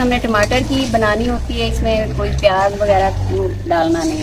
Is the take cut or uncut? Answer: uncut